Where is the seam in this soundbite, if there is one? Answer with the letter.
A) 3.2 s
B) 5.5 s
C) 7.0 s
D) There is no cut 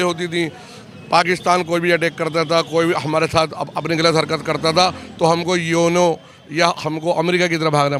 D